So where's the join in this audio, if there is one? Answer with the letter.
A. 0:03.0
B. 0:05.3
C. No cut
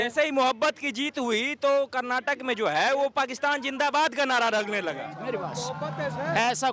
C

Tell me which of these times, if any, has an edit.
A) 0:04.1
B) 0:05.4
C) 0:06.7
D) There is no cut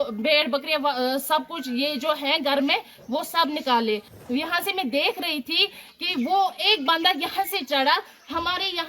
A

